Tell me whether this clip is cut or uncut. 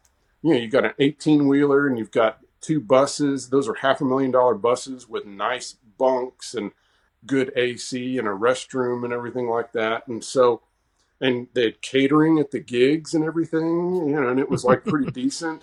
uncut